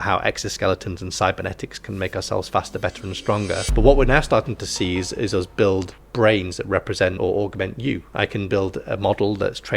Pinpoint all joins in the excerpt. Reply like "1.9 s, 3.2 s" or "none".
3.7 s, 6.0 s, 7.2 s